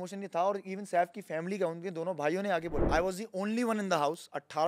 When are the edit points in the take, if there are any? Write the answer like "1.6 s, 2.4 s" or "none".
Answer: 2.8 s